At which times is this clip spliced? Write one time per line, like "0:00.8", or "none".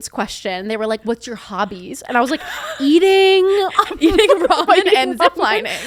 none